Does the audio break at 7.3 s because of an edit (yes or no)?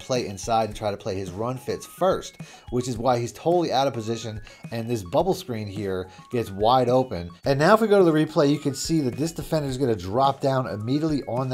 yes